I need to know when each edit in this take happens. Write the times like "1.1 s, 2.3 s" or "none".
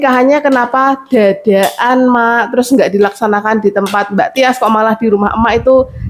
none